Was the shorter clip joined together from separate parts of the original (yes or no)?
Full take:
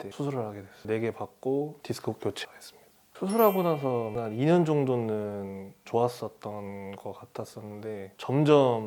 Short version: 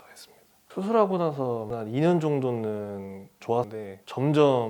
yes